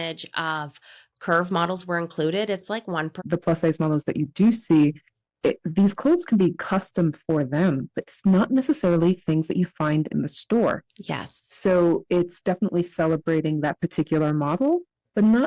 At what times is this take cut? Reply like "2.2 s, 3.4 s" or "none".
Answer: 3.2 s